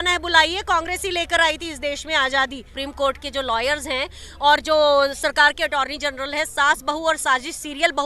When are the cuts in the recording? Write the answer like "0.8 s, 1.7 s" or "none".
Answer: 2.7 s